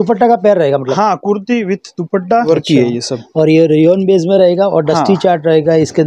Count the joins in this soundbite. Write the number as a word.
one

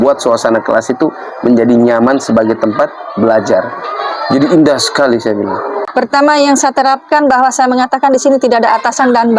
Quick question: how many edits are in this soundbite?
one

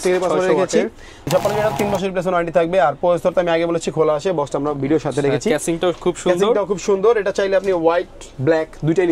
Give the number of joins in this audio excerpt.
one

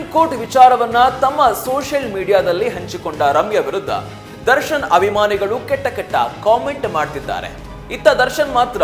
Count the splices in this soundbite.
zero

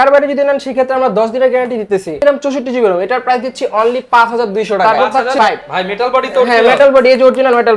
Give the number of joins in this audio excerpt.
two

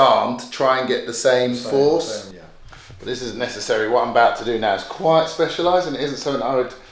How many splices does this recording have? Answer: one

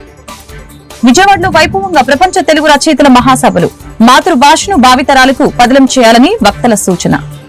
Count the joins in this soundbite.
one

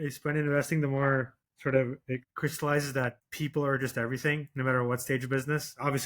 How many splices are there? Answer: two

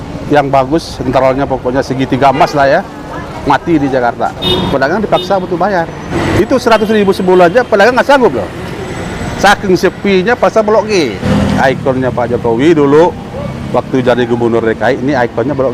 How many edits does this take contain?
three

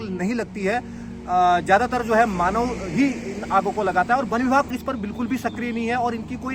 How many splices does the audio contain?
one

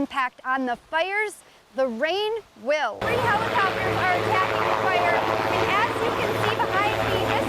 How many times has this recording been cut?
one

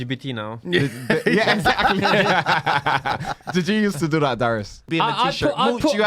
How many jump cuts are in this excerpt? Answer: one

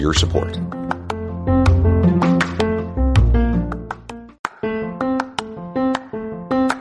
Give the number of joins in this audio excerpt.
one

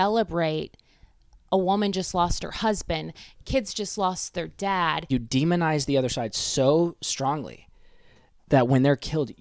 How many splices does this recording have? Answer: one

